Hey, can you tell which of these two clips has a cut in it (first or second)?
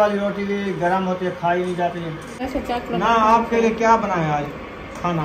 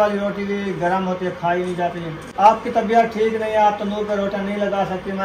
first